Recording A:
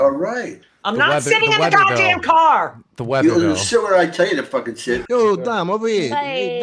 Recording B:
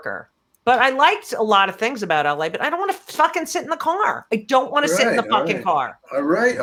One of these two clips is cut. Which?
A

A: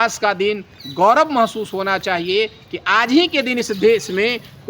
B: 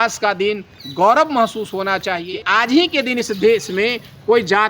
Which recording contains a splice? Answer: B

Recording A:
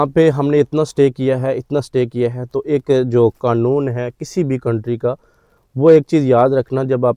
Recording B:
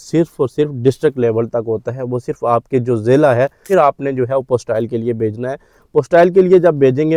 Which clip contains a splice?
B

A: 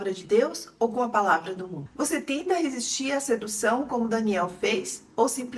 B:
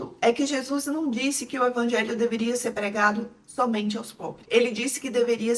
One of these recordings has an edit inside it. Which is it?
A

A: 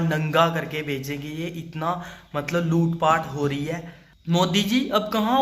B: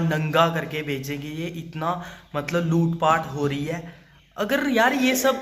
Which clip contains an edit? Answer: A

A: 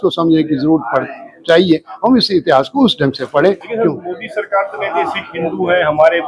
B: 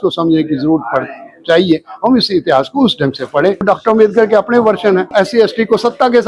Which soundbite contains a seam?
B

